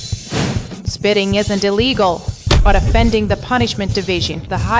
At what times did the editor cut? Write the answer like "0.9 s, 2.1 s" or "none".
none